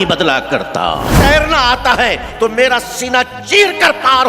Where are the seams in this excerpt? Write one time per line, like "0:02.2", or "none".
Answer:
0:01.1